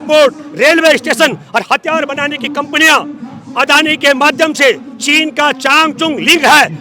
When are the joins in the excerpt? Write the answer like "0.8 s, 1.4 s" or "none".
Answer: none